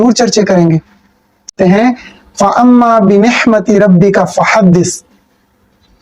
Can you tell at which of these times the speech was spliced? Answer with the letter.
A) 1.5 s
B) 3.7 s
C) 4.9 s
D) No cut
A